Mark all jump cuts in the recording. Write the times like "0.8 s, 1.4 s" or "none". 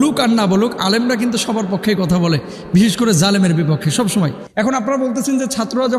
4.4 s